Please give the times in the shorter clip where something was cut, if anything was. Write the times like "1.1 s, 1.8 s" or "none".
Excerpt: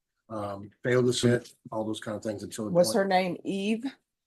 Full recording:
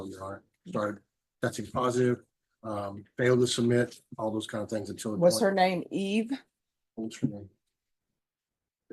1.2 s